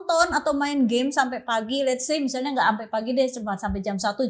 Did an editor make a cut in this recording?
no; 0 cuts

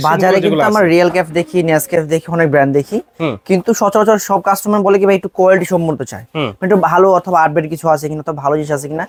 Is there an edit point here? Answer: no; 0 cuts

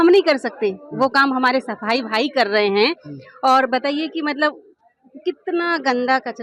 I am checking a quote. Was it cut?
no; 0 cuts

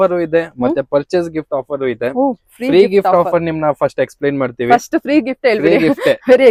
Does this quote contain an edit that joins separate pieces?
no; 0 cuts

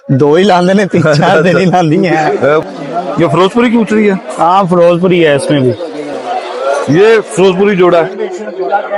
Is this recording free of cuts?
no; 2 cuts; at 2.6 s, 6.3 s

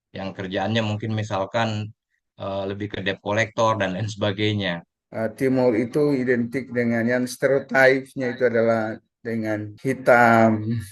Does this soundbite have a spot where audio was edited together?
yes; 2 cuts; at 5.0 s, 9.7 s

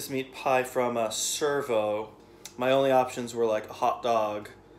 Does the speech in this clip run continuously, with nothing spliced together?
no; 1 cut; at 2.5 s

